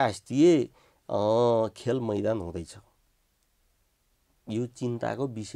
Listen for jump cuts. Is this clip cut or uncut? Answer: uncut